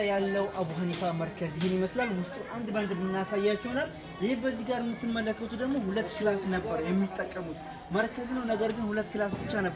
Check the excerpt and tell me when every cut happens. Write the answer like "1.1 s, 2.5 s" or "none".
none